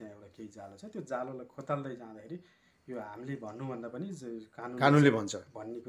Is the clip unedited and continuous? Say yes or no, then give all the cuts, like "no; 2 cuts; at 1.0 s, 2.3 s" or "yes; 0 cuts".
yes; 0 cuts